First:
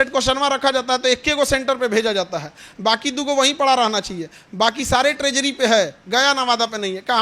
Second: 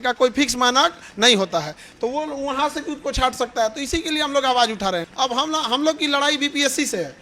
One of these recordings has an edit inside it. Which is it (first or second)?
second